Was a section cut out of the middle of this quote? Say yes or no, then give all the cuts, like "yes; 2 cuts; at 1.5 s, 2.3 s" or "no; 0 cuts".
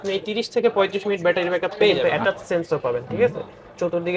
yes; 1 cut; at 2.0 s